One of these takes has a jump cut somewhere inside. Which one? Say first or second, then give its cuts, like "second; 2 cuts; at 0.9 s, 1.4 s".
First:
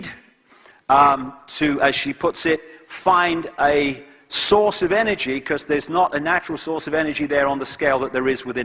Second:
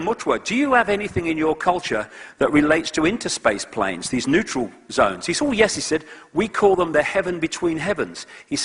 second; 1 cut; at 7.5 s